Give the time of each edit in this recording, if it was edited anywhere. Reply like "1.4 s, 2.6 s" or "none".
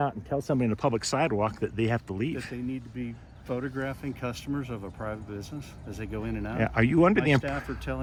none